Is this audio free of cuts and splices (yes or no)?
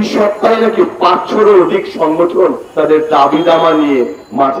yes